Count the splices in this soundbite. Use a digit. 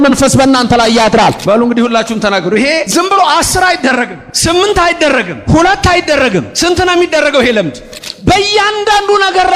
6